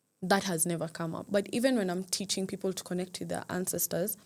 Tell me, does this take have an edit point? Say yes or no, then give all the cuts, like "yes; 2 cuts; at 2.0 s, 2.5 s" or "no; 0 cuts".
yes; 1 cut; at 1.3 s